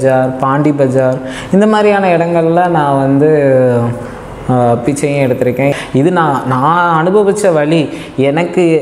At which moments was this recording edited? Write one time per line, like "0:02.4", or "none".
0:05.7